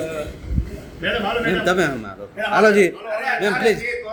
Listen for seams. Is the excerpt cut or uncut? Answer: uncut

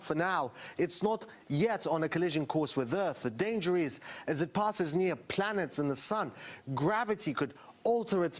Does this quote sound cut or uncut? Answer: cut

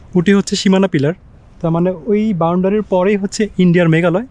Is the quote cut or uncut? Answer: uncut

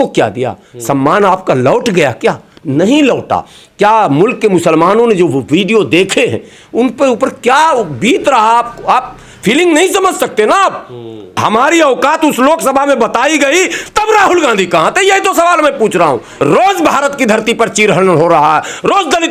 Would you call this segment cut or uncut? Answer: cut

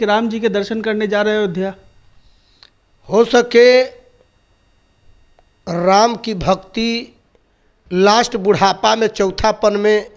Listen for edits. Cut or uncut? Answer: uncut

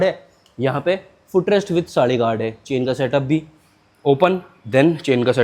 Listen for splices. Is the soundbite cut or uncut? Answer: uncut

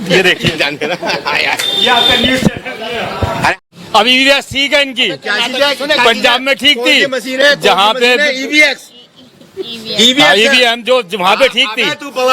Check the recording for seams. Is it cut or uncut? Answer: cut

